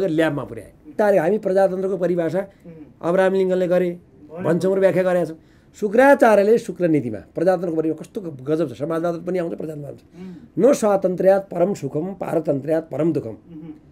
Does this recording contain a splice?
yes; 1 cut; at 0.9 s

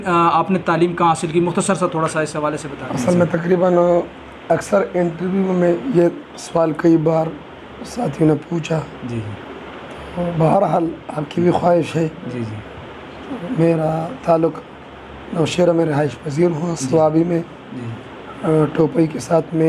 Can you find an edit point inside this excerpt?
no; 0 cuts

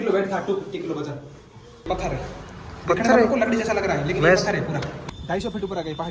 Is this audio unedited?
no; 2 cuts; at 1.9 s, 5.0 s

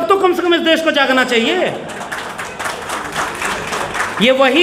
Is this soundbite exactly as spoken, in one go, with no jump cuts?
yes; 0 cuts

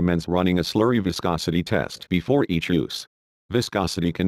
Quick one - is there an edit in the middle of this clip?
yes; 1 cut; at 2.9 s

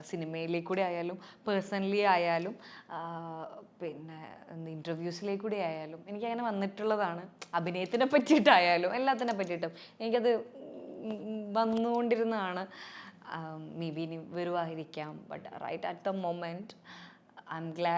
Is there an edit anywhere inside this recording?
no; 0 cuts

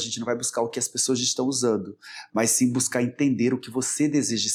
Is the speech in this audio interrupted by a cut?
no; 0 cuts

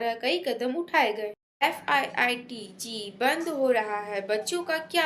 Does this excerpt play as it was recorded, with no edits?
no; 1 cut; at 1.4 s

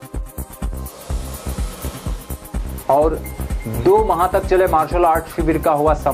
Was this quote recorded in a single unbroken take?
yes; 0 cuts

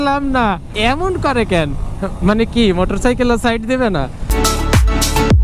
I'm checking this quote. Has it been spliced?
yes; 1 cut; at 4.3 s

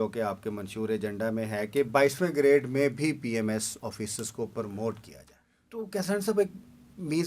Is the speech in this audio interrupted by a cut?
yes; 1 cut; at 5.8 s

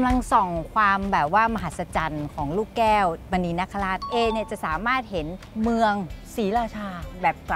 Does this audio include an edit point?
yes; 3 cuts; at 4.1 s, 5.4 s, 6.2 s

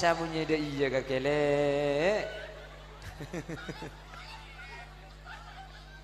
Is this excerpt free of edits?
yes; 0 cuts

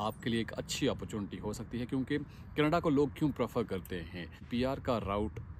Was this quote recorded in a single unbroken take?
no; 1 cut; at 4.5 s

